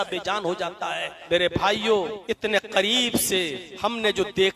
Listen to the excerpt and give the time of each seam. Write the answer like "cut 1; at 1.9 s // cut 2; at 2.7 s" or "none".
cut 1; at 1.1 s // cut 2; at 2.2 s // cut 3; at 3.7 s

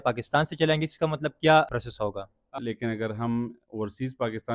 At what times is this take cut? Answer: cut 1; at 2.6 s

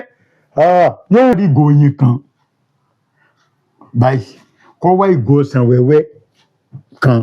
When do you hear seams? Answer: cut 1; at 1.3 s

